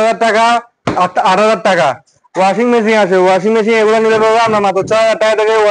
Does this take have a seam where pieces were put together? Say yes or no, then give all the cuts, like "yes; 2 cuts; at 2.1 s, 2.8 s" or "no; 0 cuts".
no; 0 cuts